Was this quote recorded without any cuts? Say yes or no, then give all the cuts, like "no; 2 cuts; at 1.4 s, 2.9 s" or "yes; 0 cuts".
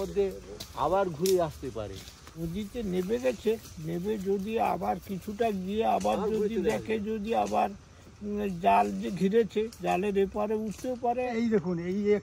no; 2 cuts; at 2.4 s, 11.3 s